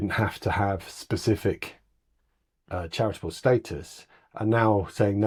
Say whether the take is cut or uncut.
uncut